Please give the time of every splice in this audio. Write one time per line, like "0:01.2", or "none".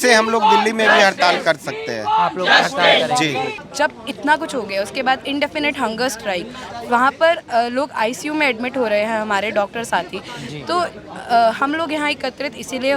0:03.5